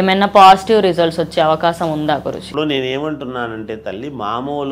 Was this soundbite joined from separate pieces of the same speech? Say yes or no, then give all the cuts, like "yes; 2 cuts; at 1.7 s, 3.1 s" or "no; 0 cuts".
no; 0 cuts